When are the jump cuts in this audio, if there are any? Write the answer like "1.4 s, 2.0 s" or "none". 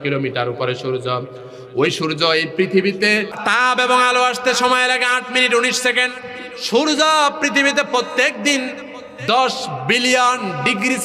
3.3 s